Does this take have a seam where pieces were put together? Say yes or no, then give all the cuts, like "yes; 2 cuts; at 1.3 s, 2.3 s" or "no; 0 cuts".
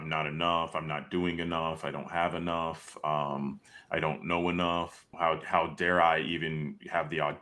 yes; 1 cut; at 5.1 s